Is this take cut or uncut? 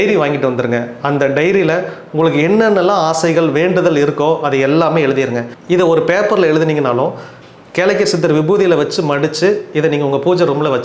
cut